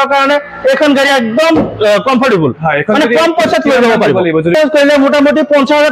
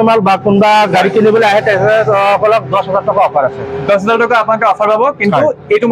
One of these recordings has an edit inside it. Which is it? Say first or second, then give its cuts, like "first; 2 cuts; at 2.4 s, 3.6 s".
first; 1 cut; at 4.5 s